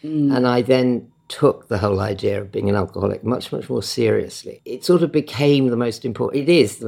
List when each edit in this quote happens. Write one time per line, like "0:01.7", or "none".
none

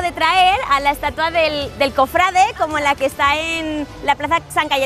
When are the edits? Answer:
none

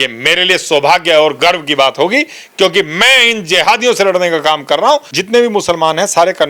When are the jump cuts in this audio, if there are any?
0:05.1

